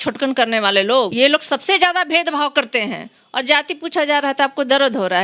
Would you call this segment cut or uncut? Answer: cut